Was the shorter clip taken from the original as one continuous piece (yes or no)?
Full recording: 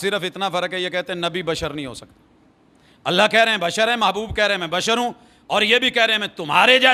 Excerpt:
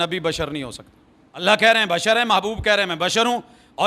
no